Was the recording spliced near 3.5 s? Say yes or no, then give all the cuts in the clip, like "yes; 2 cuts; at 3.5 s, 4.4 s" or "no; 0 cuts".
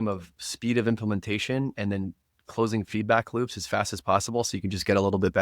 no; 0 cuts